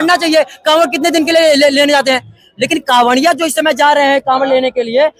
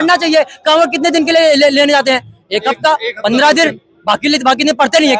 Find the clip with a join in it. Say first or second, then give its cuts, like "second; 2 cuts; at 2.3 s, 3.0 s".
first; 1 cut; at 2.4 s